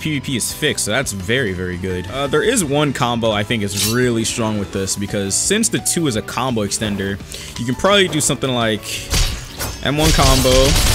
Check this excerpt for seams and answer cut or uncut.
cut